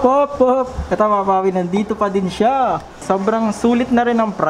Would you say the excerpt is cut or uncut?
cut